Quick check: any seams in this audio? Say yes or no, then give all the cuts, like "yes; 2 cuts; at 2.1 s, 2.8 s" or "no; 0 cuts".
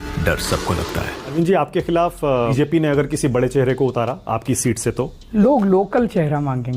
yes; 3 cuts; at 1.3 s, 2.5 s, 5.2 s